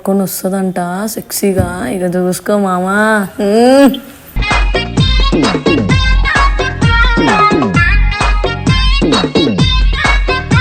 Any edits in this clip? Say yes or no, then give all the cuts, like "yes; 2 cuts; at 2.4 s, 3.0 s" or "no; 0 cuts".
no; 0 cuts